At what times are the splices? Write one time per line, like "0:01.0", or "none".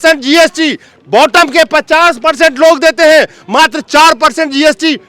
none